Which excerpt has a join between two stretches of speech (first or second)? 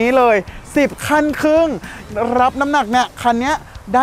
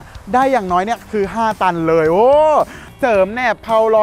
second